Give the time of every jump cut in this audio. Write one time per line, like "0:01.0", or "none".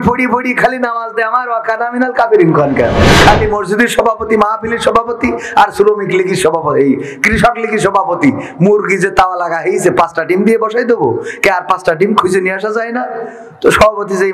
0:03.2